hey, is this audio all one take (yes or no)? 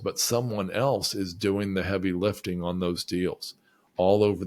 yes